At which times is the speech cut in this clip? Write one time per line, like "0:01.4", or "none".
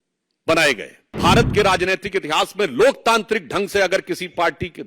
0:01.2